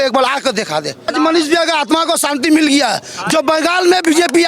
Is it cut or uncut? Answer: cut